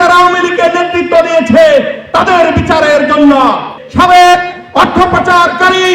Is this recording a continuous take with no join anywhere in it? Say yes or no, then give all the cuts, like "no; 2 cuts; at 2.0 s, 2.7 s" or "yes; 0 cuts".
no; 1 cut; at 3.8 s